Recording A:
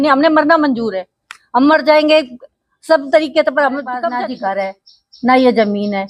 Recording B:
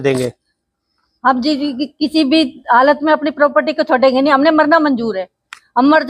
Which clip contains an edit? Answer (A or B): A